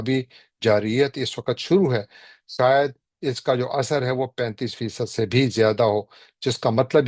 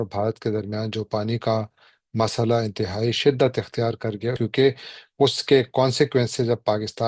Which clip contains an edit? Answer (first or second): second